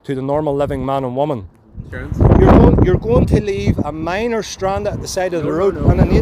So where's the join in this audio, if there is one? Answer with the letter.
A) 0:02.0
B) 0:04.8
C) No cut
A